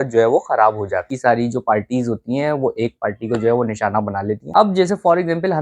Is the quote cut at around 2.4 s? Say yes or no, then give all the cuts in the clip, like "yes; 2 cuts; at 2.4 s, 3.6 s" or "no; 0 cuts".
no; 2 cuts; at 1.1 s, 4.4 s